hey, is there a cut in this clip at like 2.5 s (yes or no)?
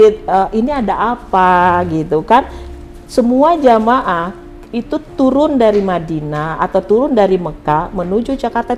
no